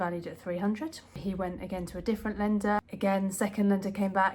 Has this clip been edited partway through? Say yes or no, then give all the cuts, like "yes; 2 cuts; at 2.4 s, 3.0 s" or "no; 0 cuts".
yes; 2 cuts; at 1.2 s, 2.8 s